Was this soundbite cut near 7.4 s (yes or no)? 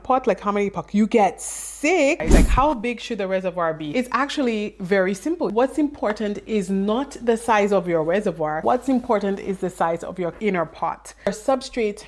no